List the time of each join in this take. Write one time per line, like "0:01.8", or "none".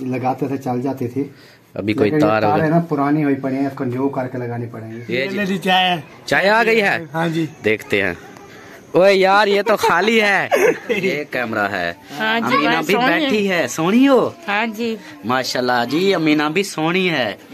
0:05.4
0:11.2